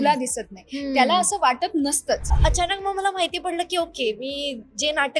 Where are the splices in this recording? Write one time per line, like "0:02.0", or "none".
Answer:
0:02.3

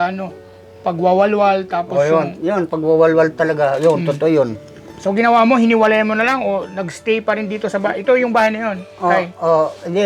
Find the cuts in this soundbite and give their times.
none

